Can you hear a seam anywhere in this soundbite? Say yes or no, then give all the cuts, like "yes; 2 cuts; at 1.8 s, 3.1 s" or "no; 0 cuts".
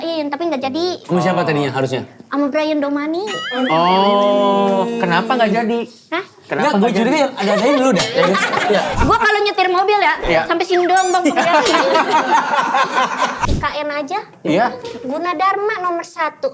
yes; 2 cuts; at 8.9 s, 13.4 s